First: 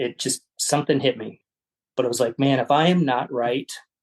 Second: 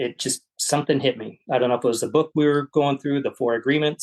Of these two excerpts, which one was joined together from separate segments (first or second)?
first